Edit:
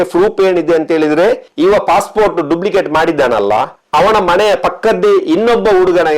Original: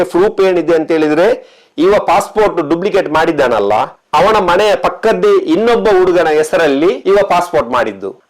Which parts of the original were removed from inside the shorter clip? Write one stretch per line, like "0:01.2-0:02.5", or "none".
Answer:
0:01.5-0:01.7